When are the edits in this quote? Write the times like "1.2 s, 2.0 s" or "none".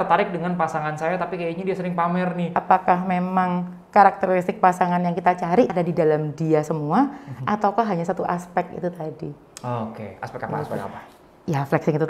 2.5 s, 5.7 s